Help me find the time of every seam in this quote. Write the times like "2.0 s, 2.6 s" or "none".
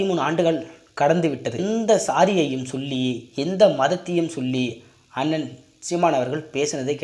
1.6 s